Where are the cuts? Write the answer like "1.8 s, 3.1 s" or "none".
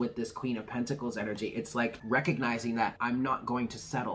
2.0 s, 3.0 s